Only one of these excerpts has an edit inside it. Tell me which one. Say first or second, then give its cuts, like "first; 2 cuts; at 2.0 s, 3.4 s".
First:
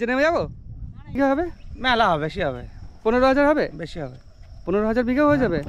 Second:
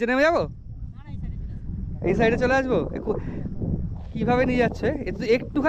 first; 1 cut; at 1.2 s